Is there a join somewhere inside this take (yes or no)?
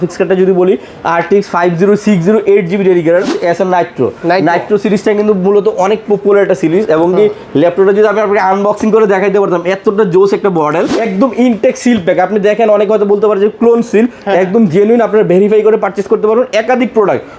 yes